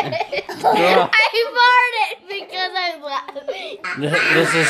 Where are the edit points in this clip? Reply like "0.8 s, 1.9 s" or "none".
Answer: 3.7 s